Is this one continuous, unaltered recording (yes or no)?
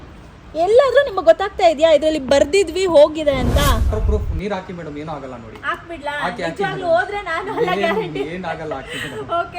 no